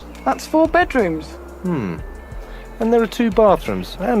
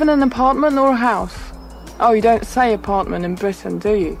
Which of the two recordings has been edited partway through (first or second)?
first